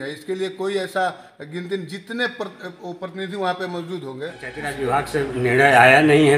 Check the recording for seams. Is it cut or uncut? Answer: cut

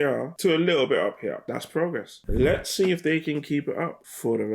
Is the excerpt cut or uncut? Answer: uncut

